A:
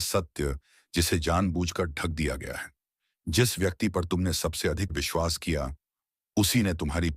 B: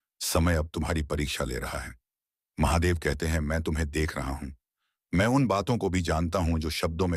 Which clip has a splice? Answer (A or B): A